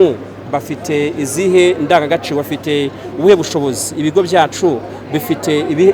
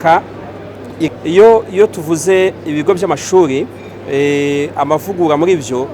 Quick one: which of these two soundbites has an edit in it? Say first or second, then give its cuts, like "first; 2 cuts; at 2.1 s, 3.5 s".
second; 1 cut; at 1.1 s